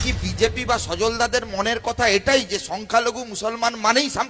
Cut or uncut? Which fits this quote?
uncut